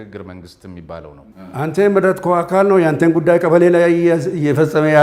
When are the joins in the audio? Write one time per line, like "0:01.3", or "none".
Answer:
0:01.3